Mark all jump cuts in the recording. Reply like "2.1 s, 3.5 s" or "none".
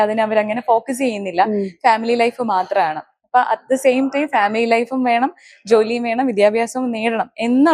none